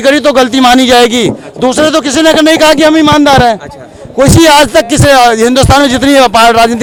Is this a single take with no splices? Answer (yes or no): yes